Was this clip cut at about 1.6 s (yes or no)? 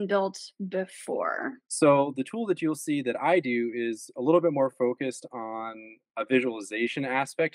yes